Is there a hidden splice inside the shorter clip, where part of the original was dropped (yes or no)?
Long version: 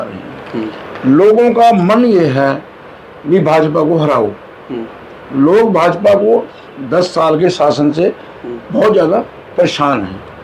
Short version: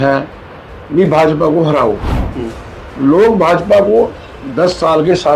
no